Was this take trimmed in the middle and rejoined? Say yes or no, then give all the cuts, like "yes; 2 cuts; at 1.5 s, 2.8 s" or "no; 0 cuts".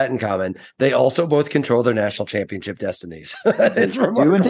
no; 0 cuts